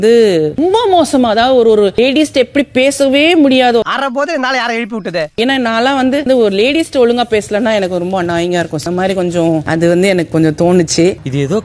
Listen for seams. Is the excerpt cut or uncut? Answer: uncut